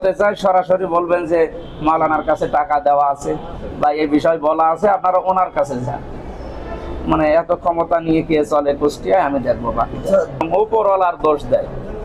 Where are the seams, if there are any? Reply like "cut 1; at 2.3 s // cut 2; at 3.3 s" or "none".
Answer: cut 1; at 10.4 s